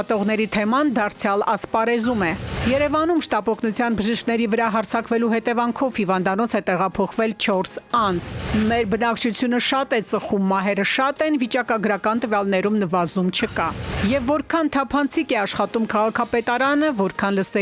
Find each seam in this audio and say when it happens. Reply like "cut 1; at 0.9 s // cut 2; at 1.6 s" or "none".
cut 1; at 8.4 s